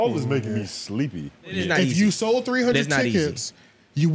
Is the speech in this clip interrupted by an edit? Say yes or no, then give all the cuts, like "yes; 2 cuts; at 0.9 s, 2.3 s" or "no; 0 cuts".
yes; 1 cut; at 1.6 s